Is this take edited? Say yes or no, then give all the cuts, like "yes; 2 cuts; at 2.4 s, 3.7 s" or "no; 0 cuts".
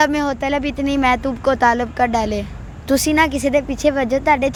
no; 0 cuts